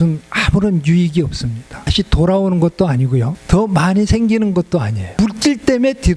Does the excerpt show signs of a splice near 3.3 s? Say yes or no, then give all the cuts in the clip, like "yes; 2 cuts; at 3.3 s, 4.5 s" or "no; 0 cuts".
yes; 3 cuts; at 1.8 s, 3.3 s, 5.2 s